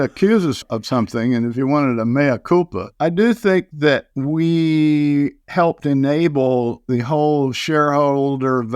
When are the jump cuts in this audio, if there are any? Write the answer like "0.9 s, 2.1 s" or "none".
2.8 s, 3.9 s, 6.8 s